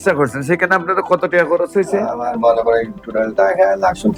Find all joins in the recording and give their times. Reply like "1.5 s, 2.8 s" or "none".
none